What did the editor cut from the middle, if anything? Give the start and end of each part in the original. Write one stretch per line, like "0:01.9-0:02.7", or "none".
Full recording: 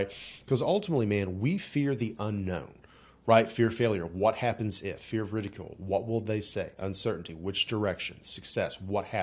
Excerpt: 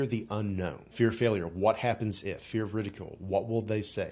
0:02.8-0:03.5